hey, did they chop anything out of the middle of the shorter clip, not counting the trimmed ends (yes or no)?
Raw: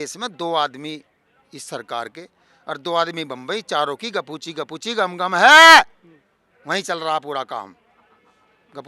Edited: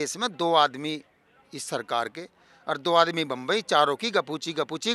no